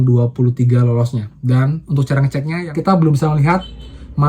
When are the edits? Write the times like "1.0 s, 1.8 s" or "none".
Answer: 2.6 s

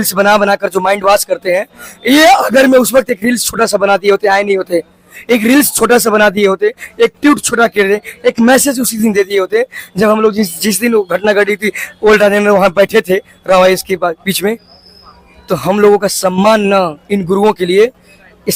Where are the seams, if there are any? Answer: none

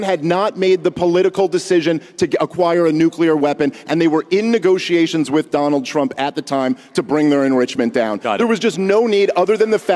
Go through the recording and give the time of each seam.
3.8 s

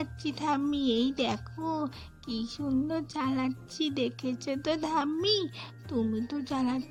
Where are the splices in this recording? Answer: none

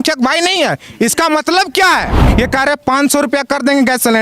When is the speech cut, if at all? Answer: 2.2 s

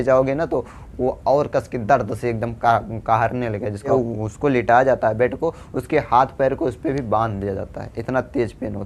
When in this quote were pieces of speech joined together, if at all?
3.9 s

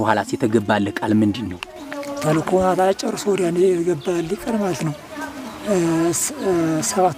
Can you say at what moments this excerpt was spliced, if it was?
none

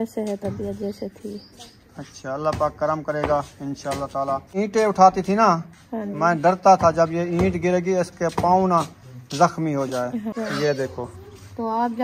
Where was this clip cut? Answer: 4.5 s, 10.3 s

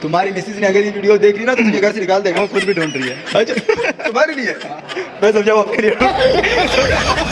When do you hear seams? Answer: none

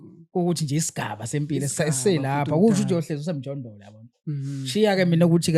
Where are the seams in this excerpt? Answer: none

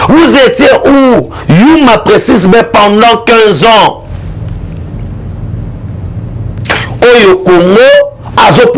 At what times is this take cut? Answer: none

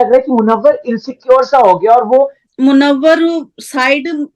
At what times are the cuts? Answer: 2.4 s

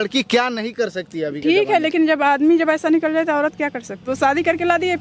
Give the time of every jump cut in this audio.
4.1 s

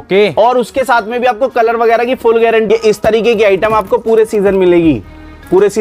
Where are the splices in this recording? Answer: 2.7 s

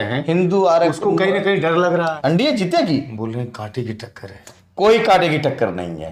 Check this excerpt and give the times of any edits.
2.1 s

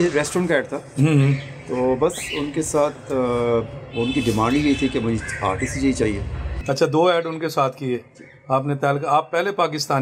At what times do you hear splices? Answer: none

